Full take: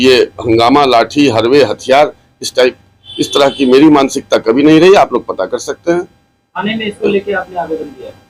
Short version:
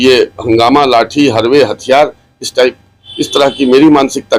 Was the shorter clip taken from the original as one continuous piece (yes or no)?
yes